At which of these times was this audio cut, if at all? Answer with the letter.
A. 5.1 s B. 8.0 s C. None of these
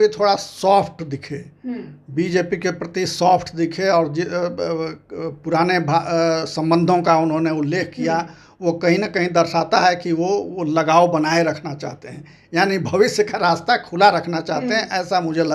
C